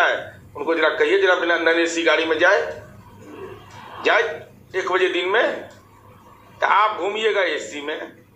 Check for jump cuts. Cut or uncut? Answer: uncut